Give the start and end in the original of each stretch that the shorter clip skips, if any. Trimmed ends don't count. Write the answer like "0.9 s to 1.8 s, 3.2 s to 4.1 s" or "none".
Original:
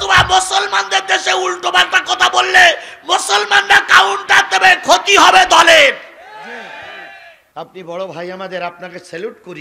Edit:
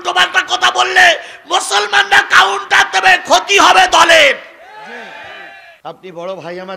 7.2 s to 7.4 s